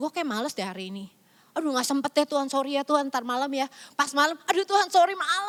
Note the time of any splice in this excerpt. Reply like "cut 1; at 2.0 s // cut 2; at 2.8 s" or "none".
none